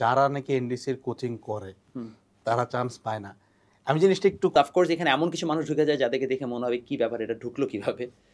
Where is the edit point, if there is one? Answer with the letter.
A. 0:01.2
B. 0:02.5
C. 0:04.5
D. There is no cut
C